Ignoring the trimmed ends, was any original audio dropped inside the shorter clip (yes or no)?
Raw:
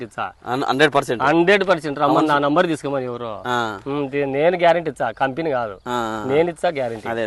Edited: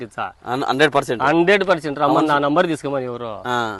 no